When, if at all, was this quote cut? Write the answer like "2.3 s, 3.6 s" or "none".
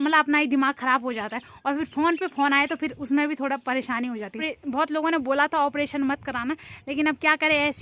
4.5 s